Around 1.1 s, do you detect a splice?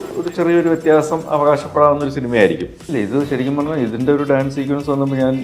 no; 1 cut; at 2.8 s

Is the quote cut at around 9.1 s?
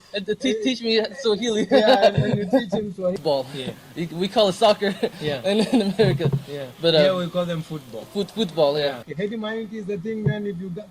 yes; 2 cuts; at 3.2 s, 9.1 s

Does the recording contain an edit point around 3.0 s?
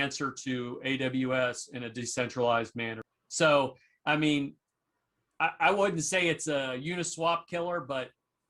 yes; 1 cut; at 3.0 s

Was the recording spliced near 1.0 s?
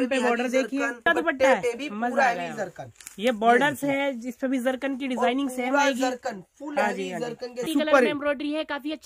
yes; 2 cuts; at 1.0 s, 7.6 s

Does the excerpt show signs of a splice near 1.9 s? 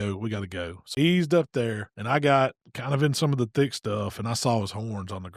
yes; 2 cuts; at 0.9 s, 1.9 s

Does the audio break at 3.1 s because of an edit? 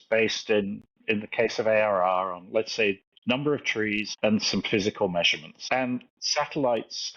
yes; 4 cuts; at 3.1 s, 4.1 s, 5.5 s, 6.2 s

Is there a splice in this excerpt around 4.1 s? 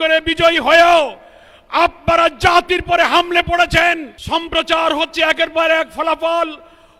yes; 1 cut; at 4.1 s

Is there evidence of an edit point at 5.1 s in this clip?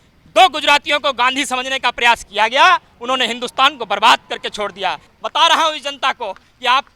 yes; 1 cut; at 5.1 s

